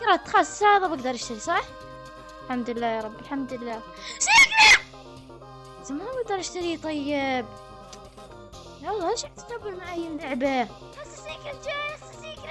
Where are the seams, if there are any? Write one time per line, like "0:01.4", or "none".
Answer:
none